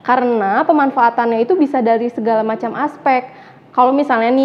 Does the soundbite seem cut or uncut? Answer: uncut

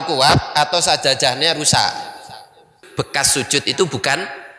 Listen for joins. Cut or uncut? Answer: cut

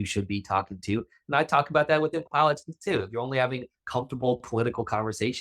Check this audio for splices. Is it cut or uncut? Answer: uncut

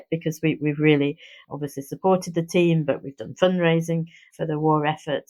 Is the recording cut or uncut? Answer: uncut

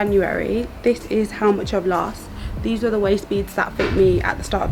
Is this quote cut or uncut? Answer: uncut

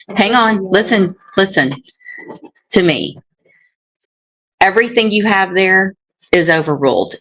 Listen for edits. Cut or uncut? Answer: uncut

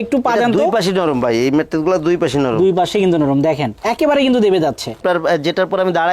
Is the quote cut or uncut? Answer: uncut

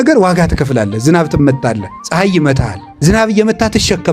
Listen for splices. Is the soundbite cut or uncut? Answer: cut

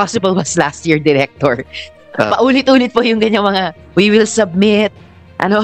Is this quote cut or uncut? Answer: uncut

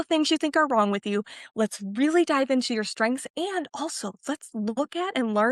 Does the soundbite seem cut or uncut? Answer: uncut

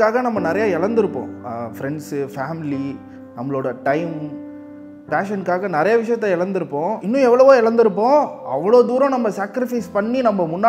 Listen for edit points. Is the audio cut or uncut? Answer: uncut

